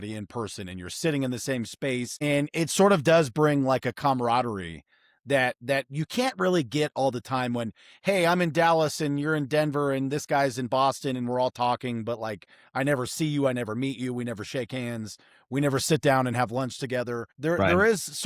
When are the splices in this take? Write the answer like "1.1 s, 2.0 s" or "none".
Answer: 2.1 s, 17.3 s